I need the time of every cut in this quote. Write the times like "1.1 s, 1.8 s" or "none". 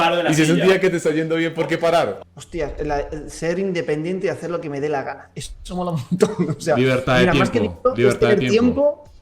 2.2 s